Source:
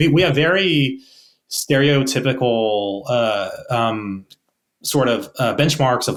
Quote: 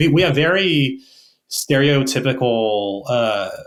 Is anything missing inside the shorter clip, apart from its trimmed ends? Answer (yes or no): no